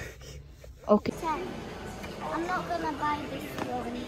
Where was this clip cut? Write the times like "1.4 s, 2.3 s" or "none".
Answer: 1.1 s